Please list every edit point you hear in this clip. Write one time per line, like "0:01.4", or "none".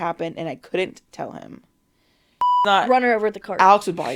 0:02.6